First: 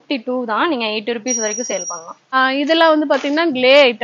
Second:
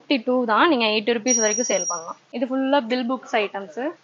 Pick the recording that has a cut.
first; 1 cut; at 2.3 s

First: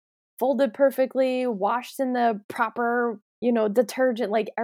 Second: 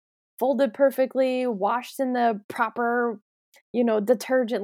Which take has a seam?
first; 1 cut; at 3.3 s

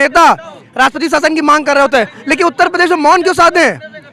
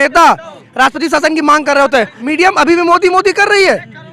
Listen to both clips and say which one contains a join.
second; 1 cut; at 2.2 s

